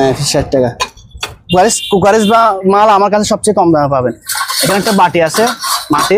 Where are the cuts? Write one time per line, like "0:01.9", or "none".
none